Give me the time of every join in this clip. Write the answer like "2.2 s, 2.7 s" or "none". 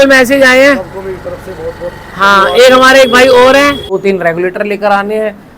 4.0 s